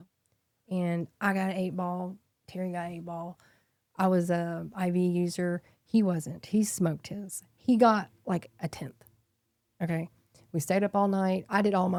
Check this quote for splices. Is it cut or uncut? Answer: uncut